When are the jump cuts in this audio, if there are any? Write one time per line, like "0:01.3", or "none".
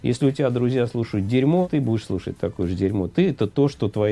0:01.7